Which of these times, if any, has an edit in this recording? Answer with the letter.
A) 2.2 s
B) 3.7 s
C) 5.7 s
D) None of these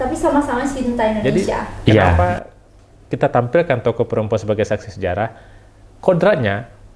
A